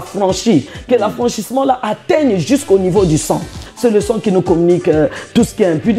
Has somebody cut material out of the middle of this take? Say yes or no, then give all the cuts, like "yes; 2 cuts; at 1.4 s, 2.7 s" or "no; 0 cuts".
yes; 1 cut; at 3.6 s